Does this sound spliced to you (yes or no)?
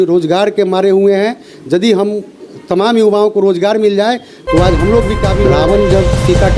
yes